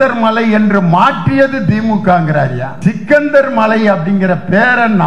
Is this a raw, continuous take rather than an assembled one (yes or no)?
no